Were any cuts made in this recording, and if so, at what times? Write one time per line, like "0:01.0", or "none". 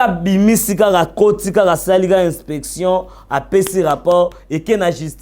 none